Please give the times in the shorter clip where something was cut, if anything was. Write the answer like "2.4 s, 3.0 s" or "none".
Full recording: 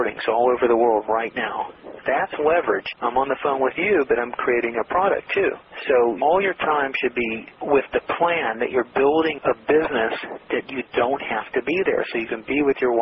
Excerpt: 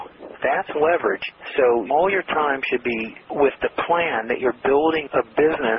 1.3 s